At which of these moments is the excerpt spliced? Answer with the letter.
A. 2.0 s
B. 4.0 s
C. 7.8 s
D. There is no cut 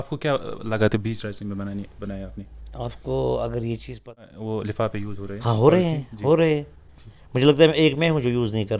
B